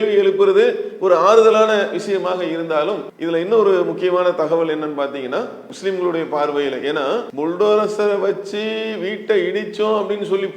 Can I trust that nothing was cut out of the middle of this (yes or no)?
no